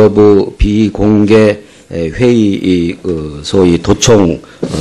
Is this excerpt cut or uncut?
uncut